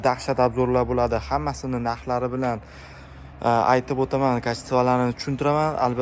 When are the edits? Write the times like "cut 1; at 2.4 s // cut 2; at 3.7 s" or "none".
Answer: none

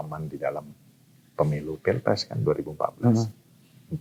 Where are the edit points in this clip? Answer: none

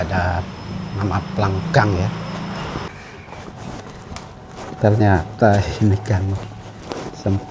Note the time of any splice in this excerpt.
cut 1; at 2.9 s

